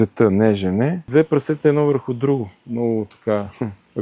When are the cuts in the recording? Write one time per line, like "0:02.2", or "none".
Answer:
0:01.1